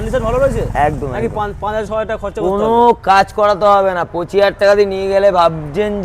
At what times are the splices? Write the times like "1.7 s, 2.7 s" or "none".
none